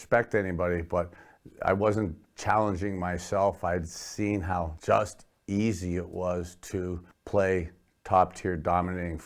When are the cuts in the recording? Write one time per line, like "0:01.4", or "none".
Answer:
0:04.8
0:07.1